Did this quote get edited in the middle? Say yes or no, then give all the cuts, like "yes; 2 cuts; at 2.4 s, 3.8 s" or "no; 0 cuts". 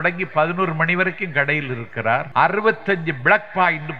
yes; 1 cut; at 2.3 s